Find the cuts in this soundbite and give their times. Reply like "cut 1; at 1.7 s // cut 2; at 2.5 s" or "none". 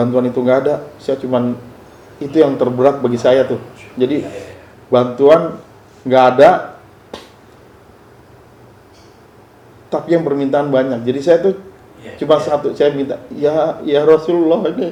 none